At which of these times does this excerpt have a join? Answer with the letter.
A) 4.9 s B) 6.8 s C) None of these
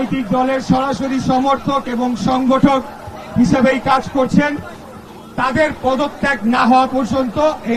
C